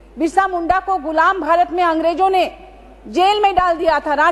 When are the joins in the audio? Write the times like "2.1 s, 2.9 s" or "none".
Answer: none